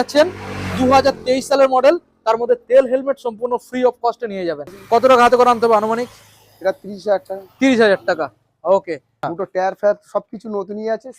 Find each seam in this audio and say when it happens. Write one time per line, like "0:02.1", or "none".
0:04.8
0:09.1

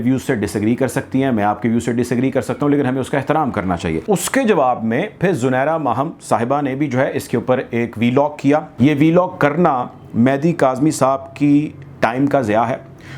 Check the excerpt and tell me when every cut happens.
0:04.0
0:08.7

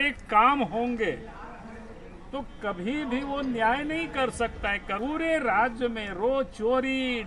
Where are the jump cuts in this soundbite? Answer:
0:05.0

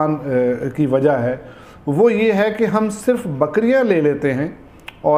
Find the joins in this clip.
none

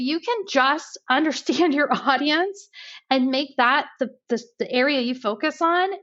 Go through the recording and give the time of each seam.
0:00.9

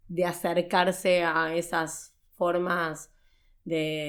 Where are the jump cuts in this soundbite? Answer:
none

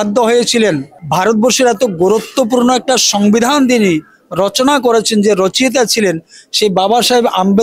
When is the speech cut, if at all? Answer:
0:00.9

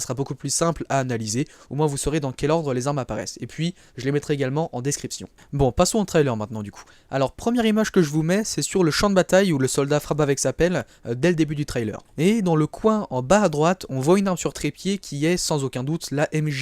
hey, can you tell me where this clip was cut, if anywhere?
0:06.1

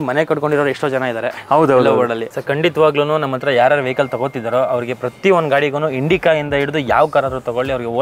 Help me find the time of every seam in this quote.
0:02.3

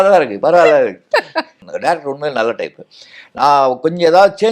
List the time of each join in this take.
0:01.6

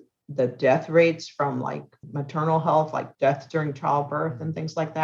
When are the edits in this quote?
0:02.0
0:03.1

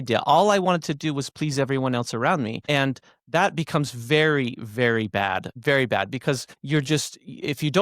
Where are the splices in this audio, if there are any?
0:02.6
0:05.5
0:06.5

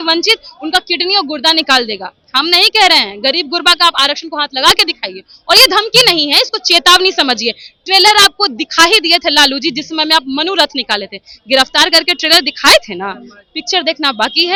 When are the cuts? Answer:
none

